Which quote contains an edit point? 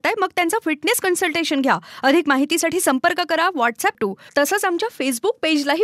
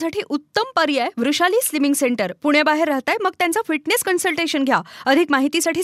first; 1 cut; at 4.0 s

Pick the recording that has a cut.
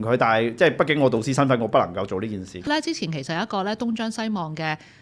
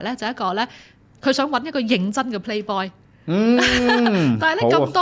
first; 1 cut; at 2.7 s

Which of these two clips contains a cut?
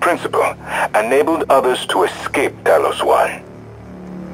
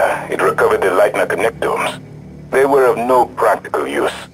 first; 1 cut; at 3.4 s

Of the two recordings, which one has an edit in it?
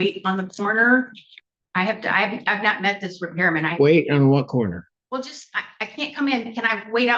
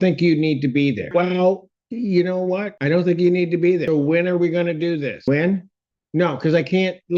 second; 4 cuts; at 1.0 s, 2.7 s, 3.9 s, 5.3 s

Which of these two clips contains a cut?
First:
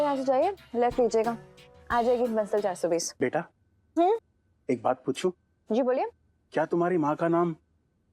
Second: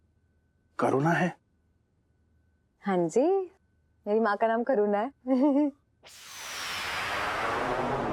first; 1 cut; at 3.1 s

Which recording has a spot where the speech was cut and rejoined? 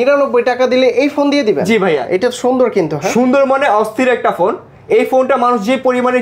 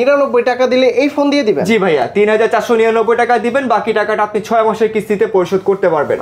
first; 1 cut; at 2.0 s

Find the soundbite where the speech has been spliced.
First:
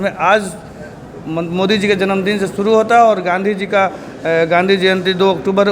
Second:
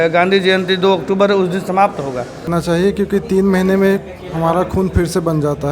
second; 1 cut; at 2.5 s

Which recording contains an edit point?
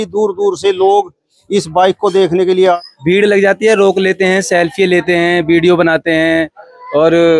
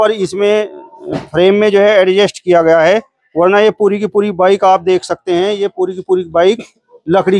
first; 1 cut; at 2.9 s

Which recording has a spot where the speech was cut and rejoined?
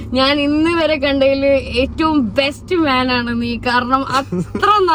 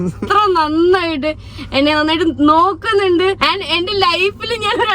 second; 1 cut; at 3.4 s

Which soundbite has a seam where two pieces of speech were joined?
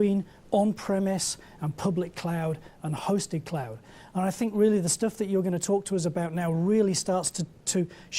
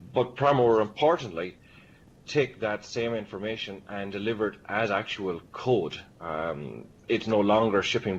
first; 1 cut; at 2.4 s

